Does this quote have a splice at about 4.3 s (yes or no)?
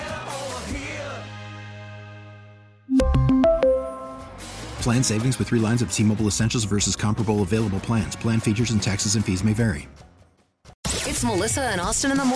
no